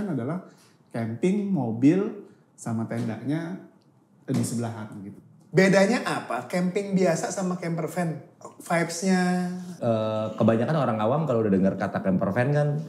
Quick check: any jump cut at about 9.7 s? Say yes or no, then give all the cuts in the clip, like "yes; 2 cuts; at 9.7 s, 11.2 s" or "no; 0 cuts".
yes; 2 cuts; at 5.1 s, 9.7 s